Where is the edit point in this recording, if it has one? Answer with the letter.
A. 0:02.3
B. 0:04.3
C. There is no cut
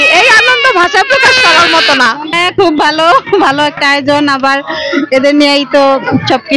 C